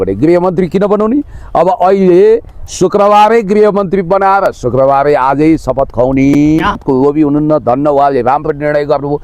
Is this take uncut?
no; 1 cut; at 6.8 s

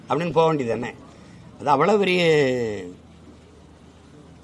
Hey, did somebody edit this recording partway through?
no; 0 cuts

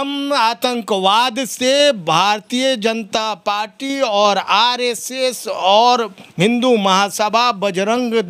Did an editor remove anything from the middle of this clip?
no; 0 cuts

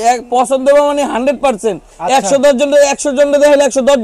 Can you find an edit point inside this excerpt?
no; 0 cuts

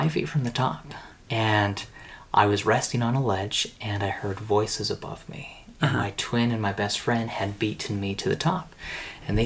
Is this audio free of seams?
no; 1 cut; at 1.1 s

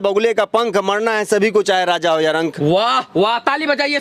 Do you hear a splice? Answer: no; 0 cuts

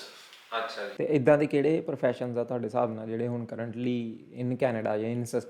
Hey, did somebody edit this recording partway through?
yes; 1 cut; at 0.9 s

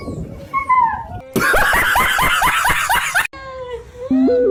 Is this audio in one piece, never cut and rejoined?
yes; 0 cuts

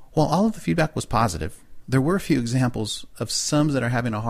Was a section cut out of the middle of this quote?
yes; 1 cut; at 2.0 s

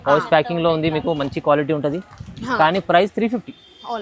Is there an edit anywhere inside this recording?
no; 0 cuts

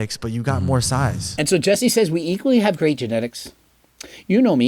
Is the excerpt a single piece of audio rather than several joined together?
yes; 0 cuts

